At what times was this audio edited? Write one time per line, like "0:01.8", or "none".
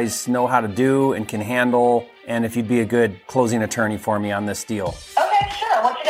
0:02.2
0:03.2
0:05.0